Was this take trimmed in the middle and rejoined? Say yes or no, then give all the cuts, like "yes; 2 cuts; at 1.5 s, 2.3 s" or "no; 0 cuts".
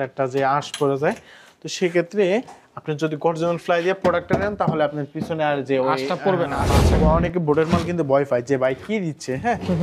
yes; 1 cut; at 6.7 s